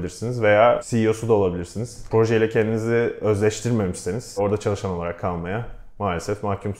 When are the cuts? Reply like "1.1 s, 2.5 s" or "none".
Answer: 0.9 s, 2.0 s, 4.4 s